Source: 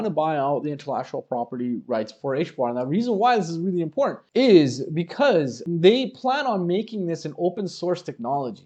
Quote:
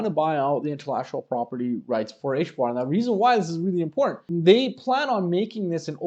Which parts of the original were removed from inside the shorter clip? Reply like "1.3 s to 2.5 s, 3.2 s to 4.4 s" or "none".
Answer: 4.2 s to 5.6 s